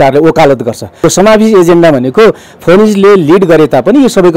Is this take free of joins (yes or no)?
no